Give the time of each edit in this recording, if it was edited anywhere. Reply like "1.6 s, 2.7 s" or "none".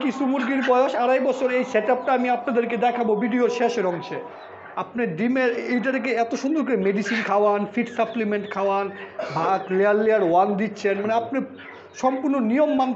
4.4 s